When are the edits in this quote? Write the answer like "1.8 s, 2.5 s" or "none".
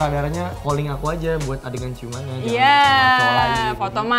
none